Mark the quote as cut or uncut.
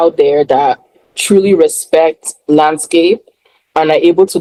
uncut